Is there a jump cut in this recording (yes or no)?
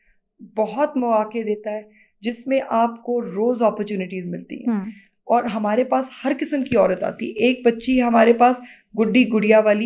no